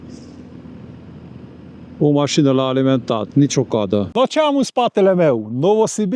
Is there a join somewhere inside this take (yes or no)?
yes